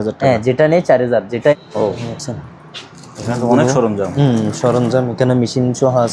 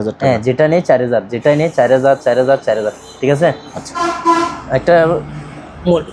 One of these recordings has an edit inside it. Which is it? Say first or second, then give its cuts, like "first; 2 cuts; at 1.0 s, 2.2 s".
first; 1 cut; at 1.5 s